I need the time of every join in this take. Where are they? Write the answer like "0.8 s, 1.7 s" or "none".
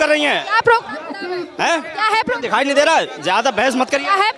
none

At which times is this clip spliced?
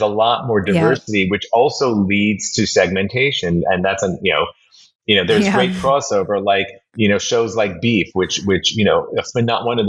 none

